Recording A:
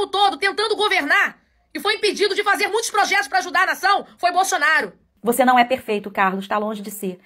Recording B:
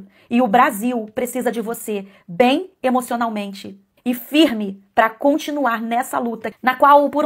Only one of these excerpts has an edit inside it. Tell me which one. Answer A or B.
A